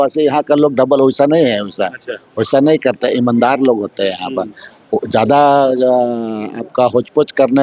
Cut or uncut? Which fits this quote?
uncut